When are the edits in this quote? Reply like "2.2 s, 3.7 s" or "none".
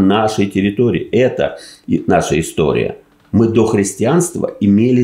none